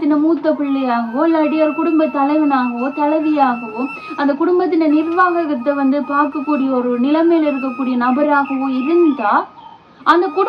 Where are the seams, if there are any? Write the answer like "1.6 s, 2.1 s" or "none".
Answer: none